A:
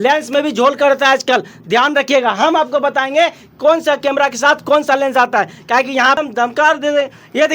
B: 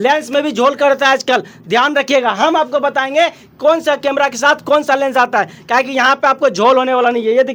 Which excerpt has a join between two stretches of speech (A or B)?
A